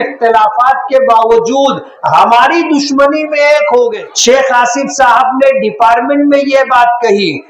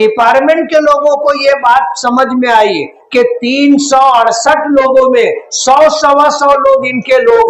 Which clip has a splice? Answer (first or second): first